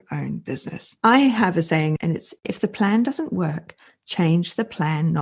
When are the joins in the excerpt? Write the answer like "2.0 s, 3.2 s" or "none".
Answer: 0.9 s, 2.4 s

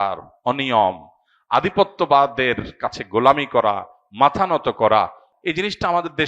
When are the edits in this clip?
5.3 s

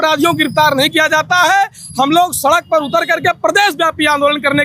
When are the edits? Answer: none

